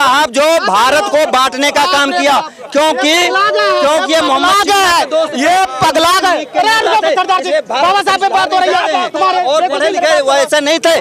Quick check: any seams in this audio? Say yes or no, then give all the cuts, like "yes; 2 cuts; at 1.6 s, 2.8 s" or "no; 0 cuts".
no; 0 cuts